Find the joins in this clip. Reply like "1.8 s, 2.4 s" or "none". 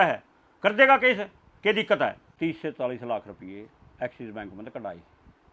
2.3 s